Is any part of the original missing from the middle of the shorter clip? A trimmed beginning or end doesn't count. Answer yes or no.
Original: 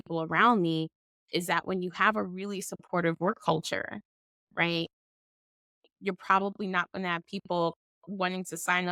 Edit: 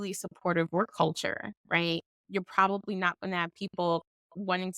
yes